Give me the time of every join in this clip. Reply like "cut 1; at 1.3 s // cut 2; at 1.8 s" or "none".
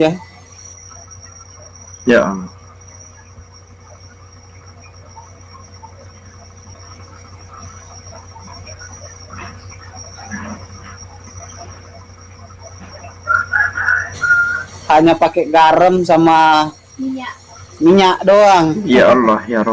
none